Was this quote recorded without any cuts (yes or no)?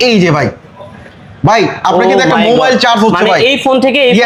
yes